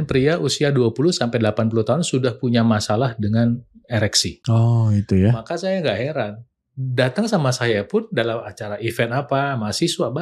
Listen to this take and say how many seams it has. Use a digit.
1